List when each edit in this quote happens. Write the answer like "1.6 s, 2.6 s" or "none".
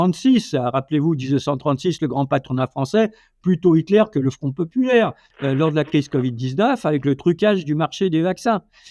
5.3 s